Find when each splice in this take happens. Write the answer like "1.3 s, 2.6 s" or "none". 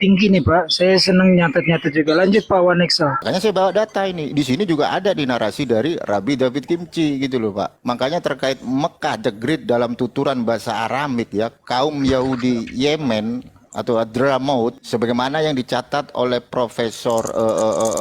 3.2 s, 7.8 s, 14.8 s